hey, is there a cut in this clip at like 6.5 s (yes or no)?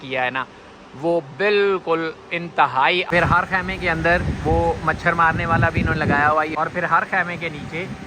yes